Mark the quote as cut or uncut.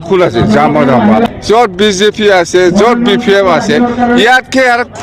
cut